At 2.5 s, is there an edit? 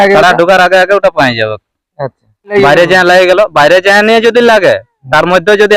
yes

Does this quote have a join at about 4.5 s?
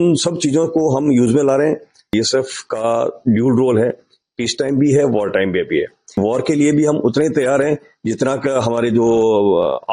no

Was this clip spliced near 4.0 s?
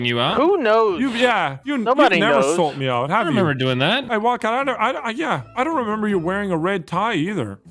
yes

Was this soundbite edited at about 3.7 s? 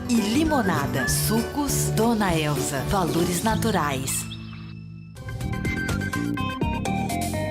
no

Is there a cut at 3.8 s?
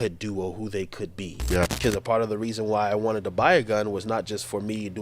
no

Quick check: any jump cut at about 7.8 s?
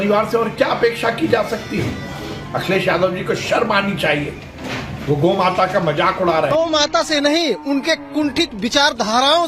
no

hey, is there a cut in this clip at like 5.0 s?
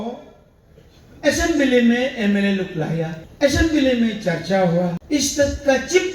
yes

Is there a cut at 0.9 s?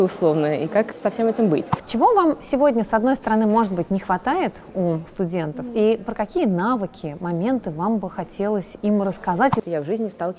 yes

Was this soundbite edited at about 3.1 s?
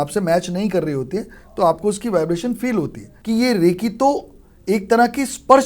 yes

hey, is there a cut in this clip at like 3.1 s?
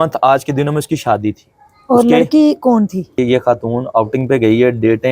yes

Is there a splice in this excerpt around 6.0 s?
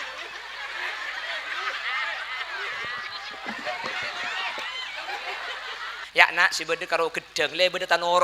yes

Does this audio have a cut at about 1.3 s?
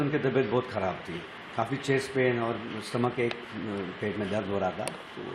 no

